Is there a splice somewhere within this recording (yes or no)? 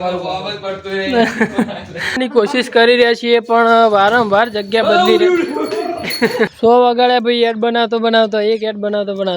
yes